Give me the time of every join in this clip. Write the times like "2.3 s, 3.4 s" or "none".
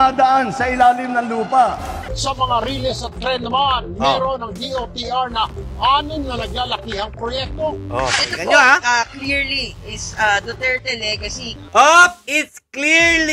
1.9 s, 11.5 s